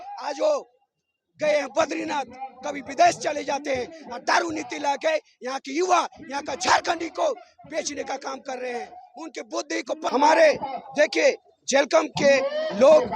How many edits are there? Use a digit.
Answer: 1